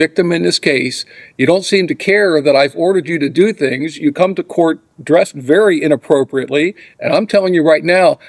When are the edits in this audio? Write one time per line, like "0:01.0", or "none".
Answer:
none